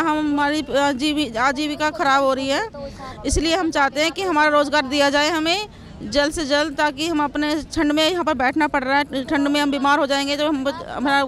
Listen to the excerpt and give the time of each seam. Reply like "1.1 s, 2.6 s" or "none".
none

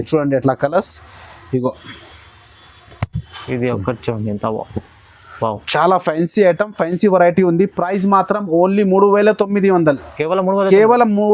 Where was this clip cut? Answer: none

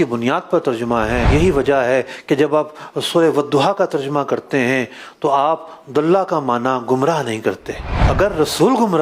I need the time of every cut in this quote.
1.3 s

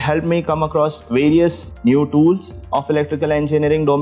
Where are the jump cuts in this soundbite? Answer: 1.7 s

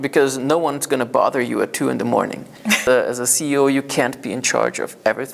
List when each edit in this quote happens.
2.8 s

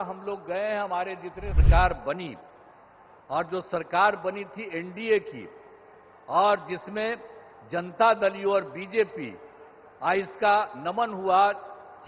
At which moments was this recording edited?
1.6 s

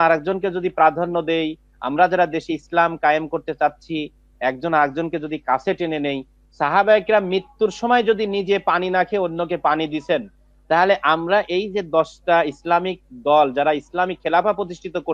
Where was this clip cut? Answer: none

